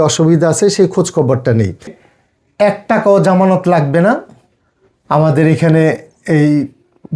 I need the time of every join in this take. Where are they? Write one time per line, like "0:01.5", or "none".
0:02.0